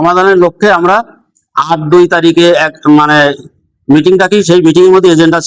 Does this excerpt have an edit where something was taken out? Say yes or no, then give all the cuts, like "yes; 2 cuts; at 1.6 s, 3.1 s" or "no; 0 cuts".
no; 0 cuts